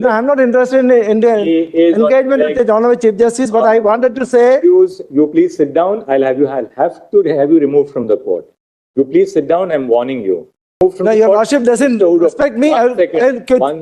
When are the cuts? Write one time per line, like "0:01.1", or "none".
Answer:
0:10.8